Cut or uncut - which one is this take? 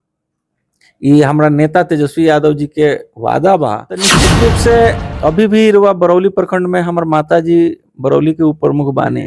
cut